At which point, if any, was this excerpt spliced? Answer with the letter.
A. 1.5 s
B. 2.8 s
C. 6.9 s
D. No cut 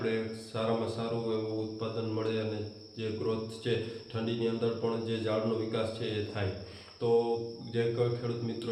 D